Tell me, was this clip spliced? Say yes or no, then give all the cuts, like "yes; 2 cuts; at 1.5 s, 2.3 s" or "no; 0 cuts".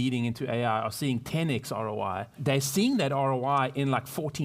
yes; 1 cut; at 2.4 s